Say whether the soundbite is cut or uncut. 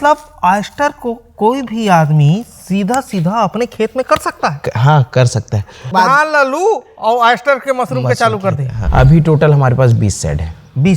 cut